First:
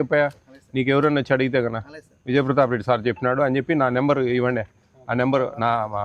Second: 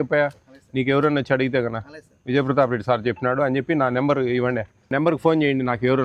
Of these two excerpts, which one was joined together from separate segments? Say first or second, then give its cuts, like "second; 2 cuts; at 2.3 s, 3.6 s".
second; 1 cut; at 4.9 s